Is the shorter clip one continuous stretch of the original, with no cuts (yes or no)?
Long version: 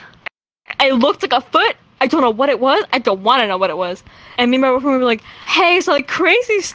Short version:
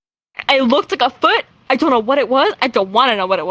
yes